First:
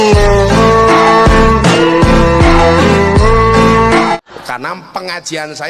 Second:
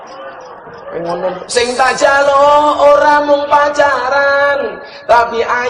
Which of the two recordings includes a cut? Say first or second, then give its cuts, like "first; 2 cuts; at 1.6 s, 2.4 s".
first; 1 cut; at 4.2 s